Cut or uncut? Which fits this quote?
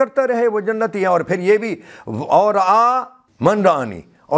cut